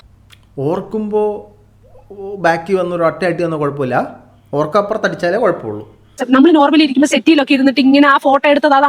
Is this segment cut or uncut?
cut